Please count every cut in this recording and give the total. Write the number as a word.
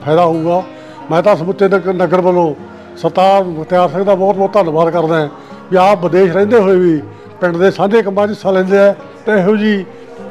zero